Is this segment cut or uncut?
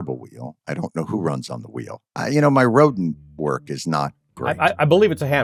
uncut